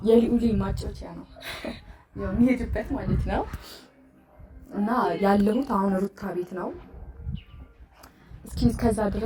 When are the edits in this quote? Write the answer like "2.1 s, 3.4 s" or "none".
none